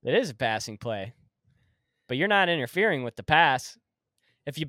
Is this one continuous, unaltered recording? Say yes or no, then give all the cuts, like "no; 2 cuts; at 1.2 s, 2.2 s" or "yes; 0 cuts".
yes; 0 cuts